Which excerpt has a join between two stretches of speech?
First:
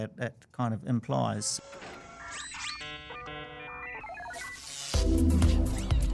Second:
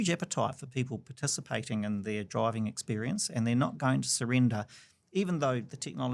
first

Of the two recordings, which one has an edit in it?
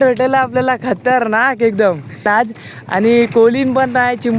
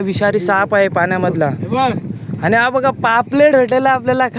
first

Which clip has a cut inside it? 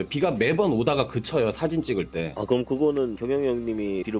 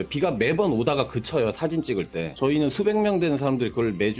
second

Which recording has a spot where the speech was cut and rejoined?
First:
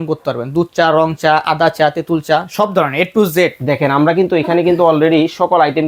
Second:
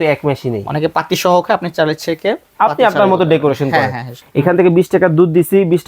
second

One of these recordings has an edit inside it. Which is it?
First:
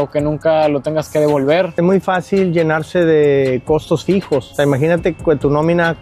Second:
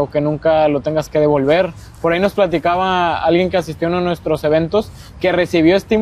first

